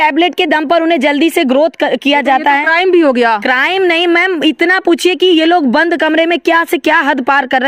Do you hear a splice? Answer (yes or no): no